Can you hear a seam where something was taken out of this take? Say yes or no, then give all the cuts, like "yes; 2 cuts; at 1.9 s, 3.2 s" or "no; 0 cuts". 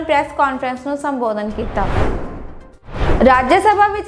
yes; 1 cut; at 2.6 s